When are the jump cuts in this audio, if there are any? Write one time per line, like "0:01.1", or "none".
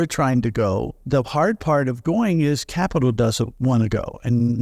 0:01.0
0:03.5